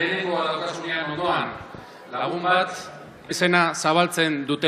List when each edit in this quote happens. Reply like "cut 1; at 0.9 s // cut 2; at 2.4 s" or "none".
none